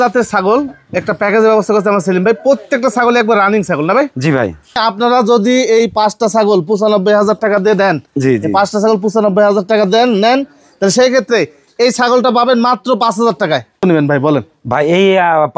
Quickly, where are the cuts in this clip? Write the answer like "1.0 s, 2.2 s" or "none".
4.8 s, 13.8 s